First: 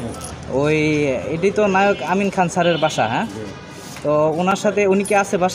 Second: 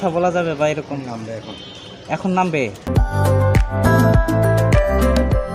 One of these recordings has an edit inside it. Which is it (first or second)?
second